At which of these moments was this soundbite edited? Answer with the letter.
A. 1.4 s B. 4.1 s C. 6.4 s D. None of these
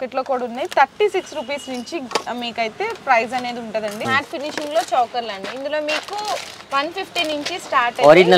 B